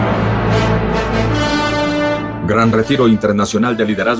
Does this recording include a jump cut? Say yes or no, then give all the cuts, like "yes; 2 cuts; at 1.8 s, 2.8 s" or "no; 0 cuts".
no; 0 cuts